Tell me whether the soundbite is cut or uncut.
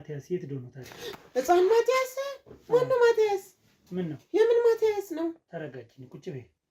uncut